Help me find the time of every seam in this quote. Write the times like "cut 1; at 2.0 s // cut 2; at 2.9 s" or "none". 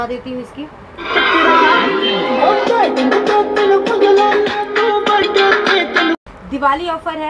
cut 1; at 6.2 s